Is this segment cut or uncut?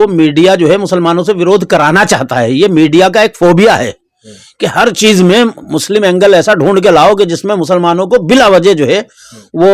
uncut